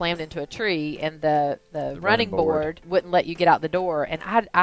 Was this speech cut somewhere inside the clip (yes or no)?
yes